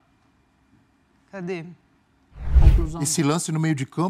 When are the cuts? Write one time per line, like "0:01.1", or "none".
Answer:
0:02.6